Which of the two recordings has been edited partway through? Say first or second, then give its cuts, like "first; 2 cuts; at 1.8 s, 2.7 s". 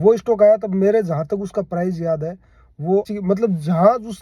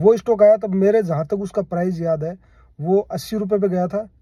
first; 1 cut; at 3.1 s